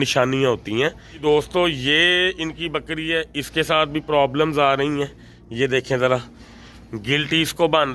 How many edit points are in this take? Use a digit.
1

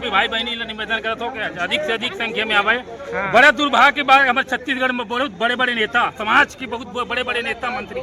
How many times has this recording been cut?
0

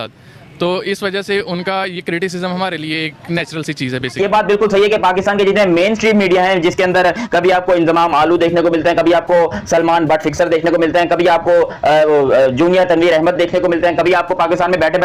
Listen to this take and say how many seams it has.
1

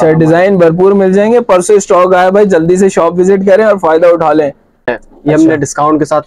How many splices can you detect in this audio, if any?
1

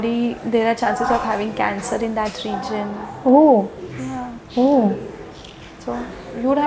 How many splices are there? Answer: 0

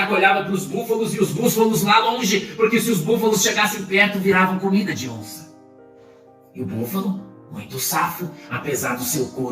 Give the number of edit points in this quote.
2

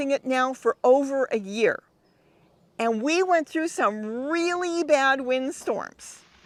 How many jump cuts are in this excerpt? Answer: 0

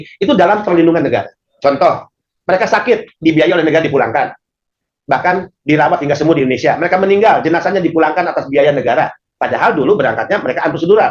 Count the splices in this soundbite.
1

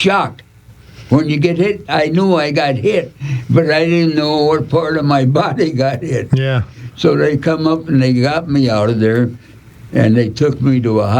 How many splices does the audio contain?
0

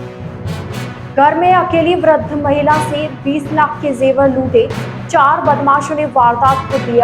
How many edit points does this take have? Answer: 1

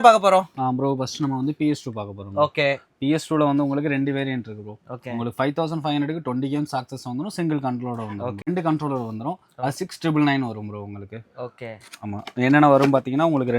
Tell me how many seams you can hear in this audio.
1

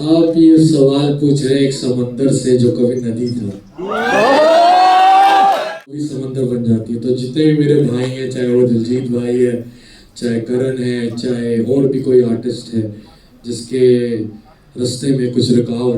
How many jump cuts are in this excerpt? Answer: 1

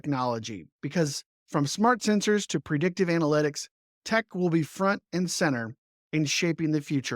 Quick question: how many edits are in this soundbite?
1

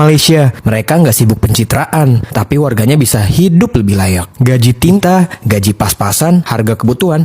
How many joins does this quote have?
1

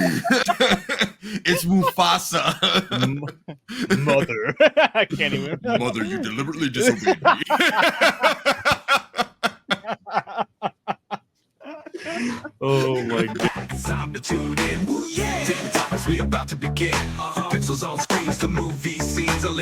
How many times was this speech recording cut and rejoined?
1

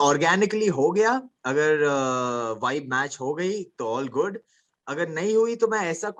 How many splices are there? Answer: 0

